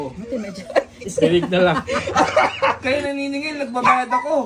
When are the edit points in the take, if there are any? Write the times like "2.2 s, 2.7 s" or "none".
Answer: 2.8 s